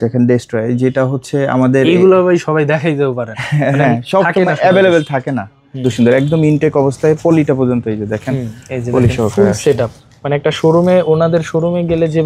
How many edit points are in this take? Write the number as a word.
one